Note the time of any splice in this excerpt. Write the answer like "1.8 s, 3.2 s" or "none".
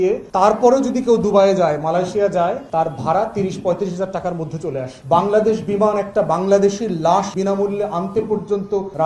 4.9 s

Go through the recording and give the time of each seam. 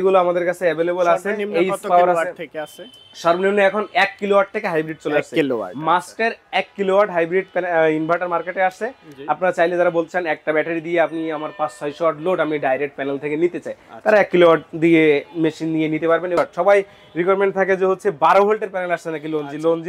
16.4 s

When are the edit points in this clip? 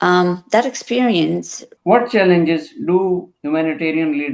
1.7 s

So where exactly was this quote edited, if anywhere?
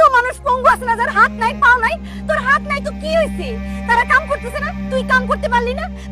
none

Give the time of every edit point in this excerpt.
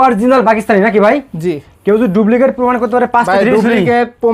none

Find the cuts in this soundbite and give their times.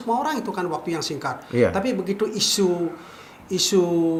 none

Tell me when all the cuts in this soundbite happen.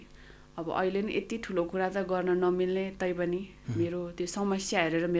none

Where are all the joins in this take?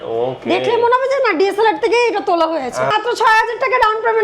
2.9 s

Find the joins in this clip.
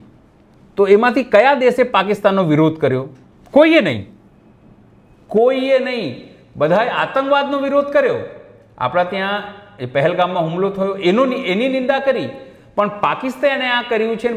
none

